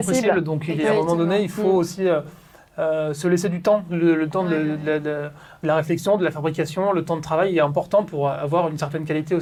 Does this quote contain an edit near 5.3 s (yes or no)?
no